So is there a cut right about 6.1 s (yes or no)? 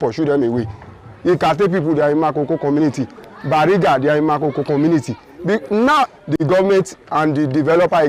yes